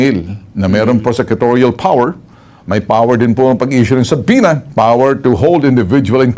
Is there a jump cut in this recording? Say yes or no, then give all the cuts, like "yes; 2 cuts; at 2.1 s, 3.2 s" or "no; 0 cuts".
yes; 1 cut; at 4.7 s